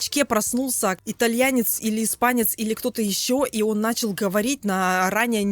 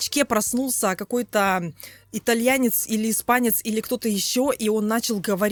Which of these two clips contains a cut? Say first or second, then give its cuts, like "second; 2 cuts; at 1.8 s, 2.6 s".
first; 1 cut; at 1.0 s